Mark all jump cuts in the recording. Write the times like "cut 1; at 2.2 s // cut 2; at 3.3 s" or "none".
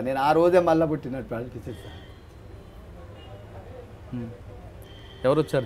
none